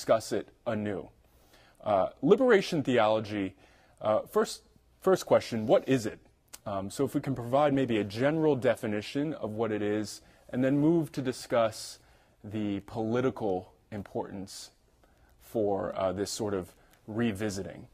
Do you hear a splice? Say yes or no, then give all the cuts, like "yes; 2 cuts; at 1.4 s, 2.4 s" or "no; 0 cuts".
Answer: no; 0 cuts